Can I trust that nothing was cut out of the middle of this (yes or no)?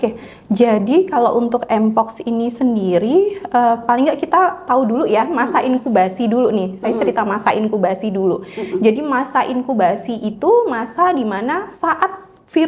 yes